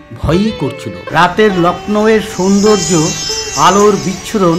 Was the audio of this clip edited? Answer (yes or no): yes